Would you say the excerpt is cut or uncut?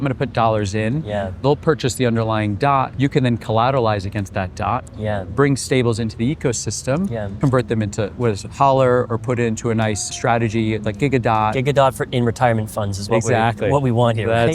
cut